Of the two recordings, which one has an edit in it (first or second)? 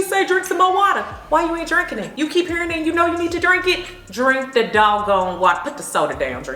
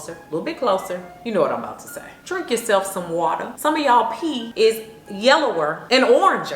second